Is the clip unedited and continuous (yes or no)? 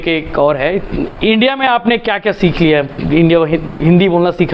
yes